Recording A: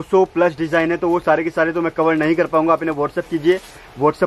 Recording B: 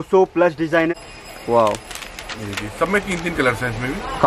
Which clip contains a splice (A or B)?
B